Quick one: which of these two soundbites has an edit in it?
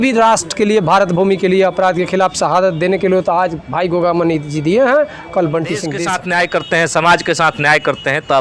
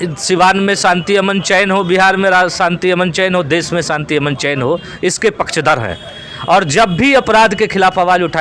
first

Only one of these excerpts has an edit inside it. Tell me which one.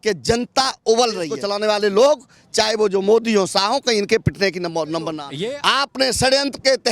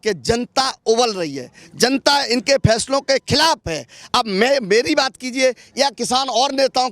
first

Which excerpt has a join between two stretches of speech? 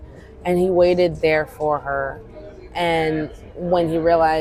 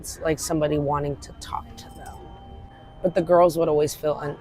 second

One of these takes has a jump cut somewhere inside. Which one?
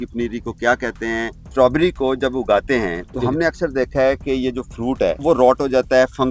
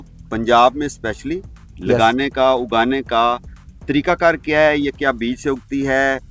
first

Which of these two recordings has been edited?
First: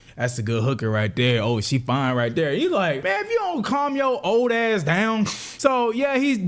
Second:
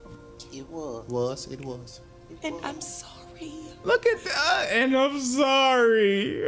first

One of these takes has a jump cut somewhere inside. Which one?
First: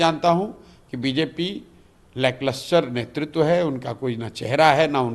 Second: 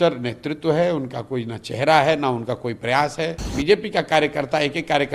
second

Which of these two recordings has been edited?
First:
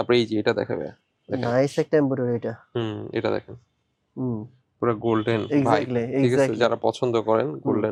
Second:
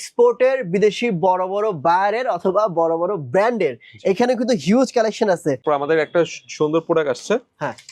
second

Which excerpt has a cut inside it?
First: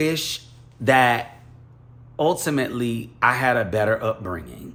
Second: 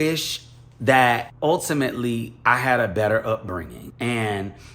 second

